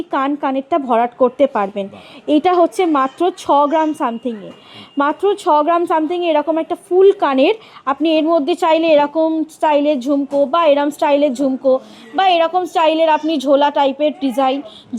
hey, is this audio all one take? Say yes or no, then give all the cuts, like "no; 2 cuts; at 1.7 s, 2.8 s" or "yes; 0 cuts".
yes; 0 cuts